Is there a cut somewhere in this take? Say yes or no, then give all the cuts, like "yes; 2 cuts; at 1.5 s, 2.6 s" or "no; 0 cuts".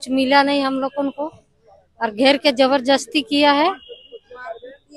no; 0 cuts